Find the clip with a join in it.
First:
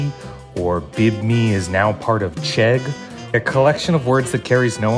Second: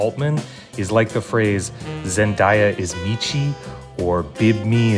first; 1 cut; at 3.3 s

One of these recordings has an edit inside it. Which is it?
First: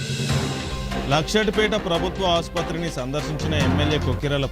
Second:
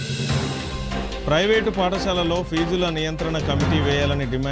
second; 1 cut; at 1.0 s

